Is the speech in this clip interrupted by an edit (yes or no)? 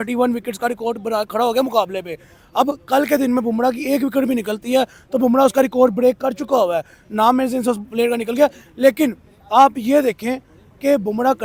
no